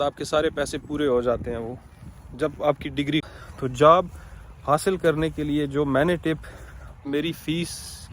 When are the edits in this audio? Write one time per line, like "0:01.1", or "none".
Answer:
0:03.2
0:07.1